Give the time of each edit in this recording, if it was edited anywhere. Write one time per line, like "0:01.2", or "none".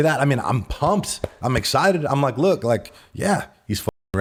none